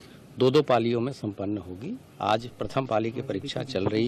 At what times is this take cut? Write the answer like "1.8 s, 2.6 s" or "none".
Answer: none